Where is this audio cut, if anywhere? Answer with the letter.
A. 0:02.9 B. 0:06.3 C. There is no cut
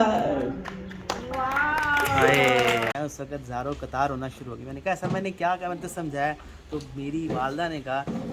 A